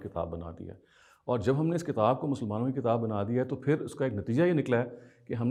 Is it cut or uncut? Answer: uncut